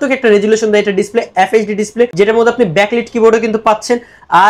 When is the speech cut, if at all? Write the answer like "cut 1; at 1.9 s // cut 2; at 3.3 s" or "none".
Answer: none

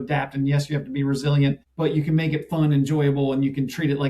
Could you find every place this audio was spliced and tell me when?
cut 1; at 1.7 s

